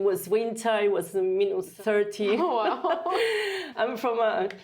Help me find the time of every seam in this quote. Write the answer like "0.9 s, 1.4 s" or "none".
1.7 s, 3.6 s